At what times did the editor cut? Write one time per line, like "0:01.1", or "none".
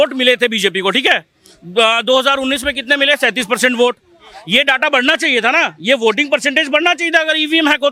none